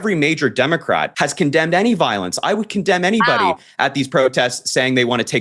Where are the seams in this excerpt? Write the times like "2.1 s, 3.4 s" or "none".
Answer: 1.1 s